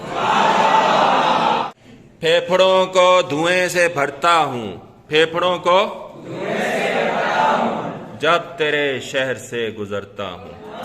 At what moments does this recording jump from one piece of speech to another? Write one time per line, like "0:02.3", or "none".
0:01.7